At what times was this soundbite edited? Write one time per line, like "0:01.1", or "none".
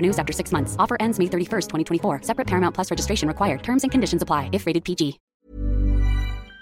0:05.2